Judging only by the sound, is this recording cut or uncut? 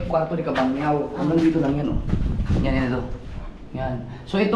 uncut